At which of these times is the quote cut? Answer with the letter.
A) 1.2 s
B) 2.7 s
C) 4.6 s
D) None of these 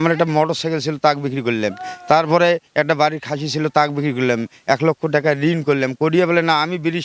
D